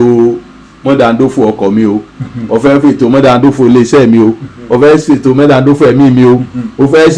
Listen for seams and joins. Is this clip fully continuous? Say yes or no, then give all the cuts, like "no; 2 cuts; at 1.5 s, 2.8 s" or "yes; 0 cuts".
yes; 0 cuts